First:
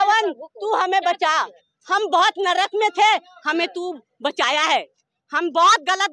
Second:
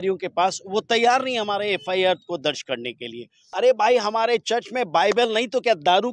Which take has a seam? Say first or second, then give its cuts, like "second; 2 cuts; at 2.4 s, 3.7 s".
second; 1 cut; at 3.4 s